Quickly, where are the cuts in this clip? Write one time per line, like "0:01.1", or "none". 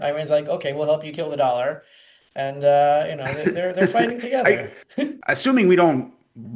0:05.2